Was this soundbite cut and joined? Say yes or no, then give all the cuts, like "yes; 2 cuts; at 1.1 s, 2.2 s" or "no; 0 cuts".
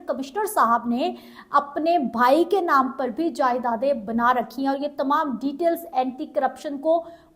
no; 0 cuts